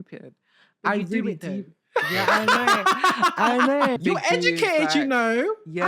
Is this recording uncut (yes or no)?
no